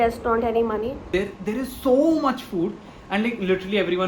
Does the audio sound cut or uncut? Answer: cut